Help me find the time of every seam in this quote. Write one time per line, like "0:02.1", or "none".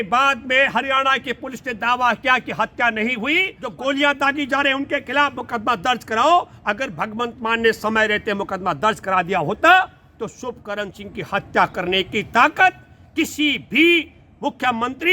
0:03.6